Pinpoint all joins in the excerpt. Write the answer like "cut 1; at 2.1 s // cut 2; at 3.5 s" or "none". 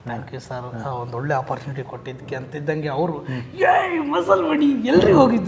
none

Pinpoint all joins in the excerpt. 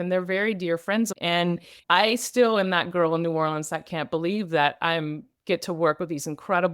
cut 1; at 1.1 s

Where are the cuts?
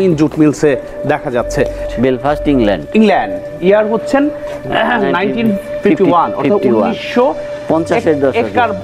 cut 1; at 1.8 s

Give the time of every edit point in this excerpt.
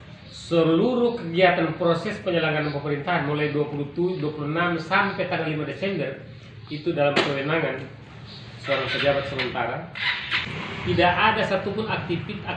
cut 1; at 10.5 s

